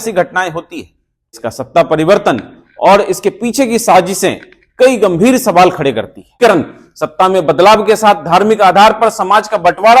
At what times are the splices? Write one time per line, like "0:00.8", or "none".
0:01.4
0:06.4